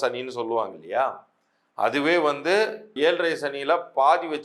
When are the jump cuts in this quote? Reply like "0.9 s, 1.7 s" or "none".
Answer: 2.9 s